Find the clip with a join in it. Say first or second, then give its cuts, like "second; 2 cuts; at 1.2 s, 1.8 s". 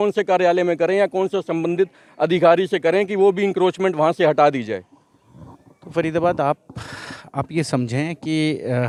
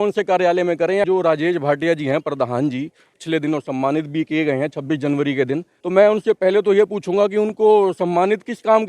second; 3 cuts; at 1.1 s, 3.1 s, 5.7 s